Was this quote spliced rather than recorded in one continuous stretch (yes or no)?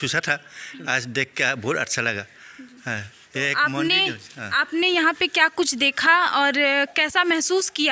no